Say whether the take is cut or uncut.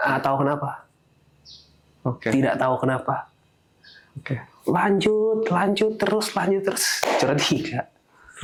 uncut